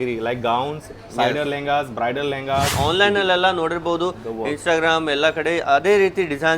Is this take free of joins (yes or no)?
no